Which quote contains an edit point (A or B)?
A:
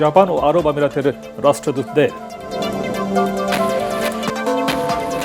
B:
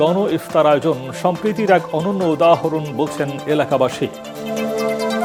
A